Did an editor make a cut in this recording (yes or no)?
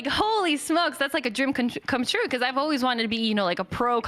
no